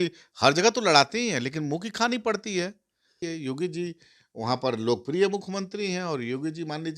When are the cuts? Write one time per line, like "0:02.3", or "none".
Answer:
0:03.2